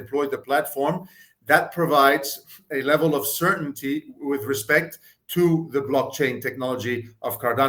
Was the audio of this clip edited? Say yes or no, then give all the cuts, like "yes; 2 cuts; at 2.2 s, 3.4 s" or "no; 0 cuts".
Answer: no; 0 cuts